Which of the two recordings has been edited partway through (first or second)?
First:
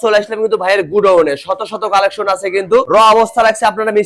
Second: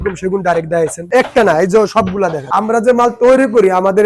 second